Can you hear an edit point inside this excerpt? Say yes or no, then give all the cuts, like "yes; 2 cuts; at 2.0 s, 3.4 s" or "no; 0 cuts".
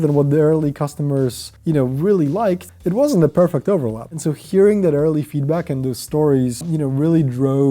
yes; 2 cuts; at 1.5 s, 2.7 s